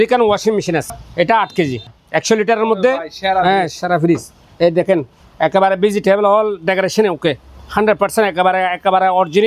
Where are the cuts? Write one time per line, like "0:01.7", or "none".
0:01.0
0:02.0